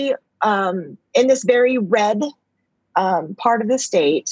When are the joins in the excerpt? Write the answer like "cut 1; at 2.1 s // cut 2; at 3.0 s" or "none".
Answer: none